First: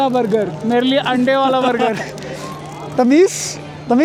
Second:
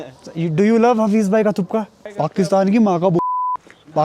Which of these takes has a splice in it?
second; 1 cut; at 2.0 s

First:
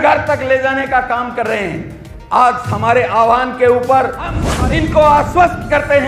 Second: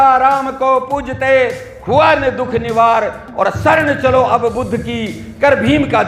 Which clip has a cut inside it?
first; 1 cut; at 4.4 s

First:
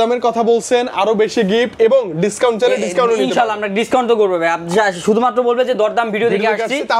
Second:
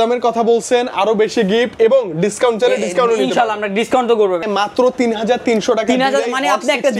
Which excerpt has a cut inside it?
second; 1 cut; at 4.4 s

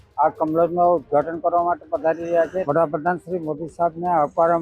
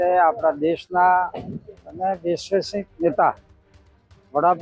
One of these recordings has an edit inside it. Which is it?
first; 1 cut; at 2.6 s

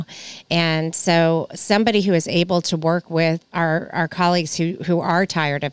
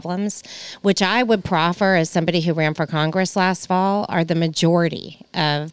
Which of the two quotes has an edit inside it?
first; 1 cut; at 3.4 s

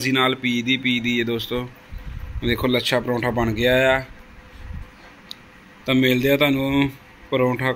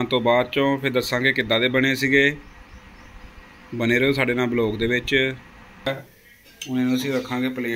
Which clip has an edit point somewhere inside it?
second; 1 cut; at 5.9 s

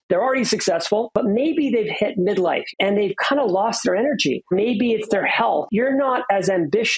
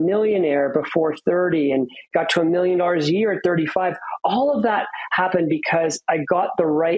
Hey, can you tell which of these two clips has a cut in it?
first; 4 cuts; at 1.1 s, 2.6 s, 4.5 s, 5.6 s

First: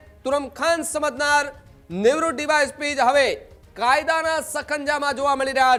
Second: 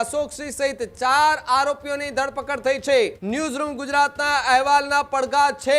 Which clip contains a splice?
second; 1 cut; at 3.2 s

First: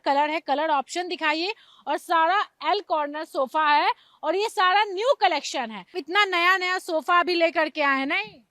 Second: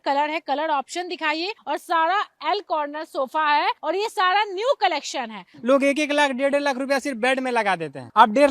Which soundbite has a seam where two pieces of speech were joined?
second; 3 cuts; at 1.6 s, 3.8 s, 5.5 s

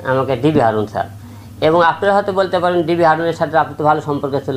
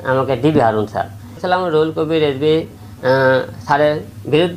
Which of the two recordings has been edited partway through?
second; 1 cut; at 1.4 s

